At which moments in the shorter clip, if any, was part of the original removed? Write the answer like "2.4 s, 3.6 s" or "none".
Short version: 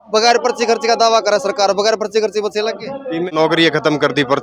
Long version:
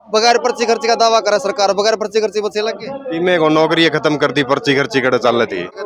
3.3 s